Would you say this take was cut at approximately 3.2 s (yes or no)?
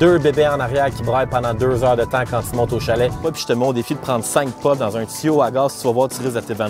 yes